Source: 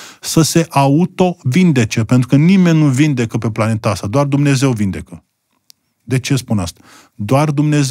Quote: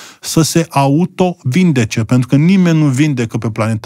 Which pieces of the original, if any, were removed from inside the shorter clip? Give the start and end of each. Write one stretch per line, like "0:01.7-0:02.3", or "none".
none